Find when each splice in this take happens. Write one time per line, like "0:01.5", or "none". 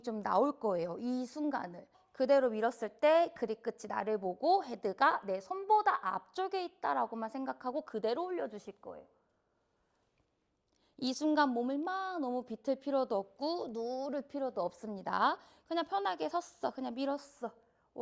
0:02.0

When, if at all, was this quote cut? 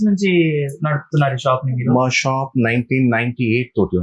none

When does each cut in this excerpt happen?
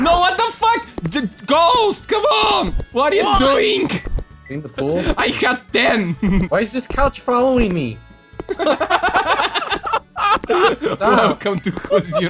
0:06.5

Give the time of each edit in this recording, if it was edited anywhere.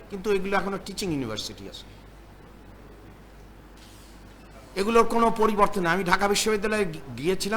none

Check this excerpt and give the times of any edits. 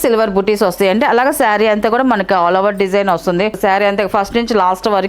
0:03.6

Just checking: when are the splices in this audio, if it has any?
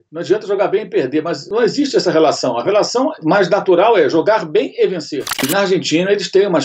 0:01.4
0:03.2
0:05.5

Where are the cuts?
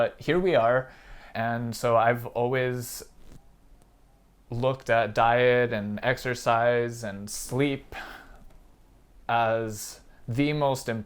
0:01.3

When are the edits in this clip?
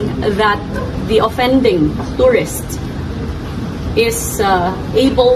none

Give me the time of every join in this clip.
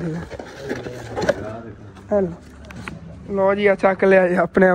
none

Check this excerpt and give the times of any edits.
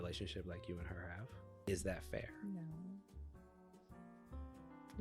0:01.6

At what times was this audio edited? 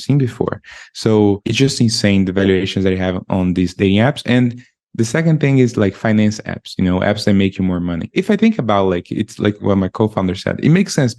0:01.5
0:08.1
0:09.6

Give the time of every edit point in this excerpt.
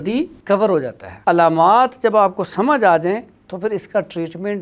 0:01.0

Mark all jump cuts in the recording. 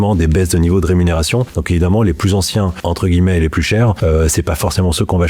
0:01.5
0:02.8
0:04.0

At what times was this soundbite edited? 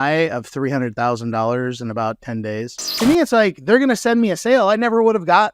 0:02.8

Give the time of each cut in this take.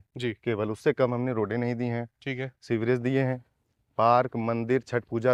none

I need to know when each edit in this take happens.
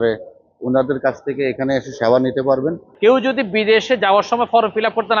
0:02.9

